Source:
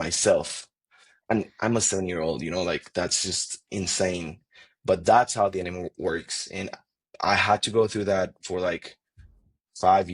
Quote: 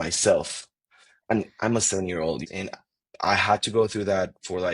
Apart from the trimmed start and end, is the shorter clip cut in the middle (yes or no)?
yes